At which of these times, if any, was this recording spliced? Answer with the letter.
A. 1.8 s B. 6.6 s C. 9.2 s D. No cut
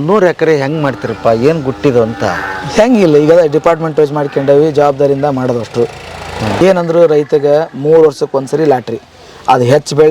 B